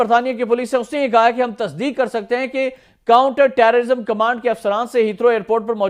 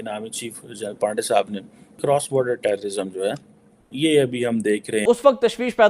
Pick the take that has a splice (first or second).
second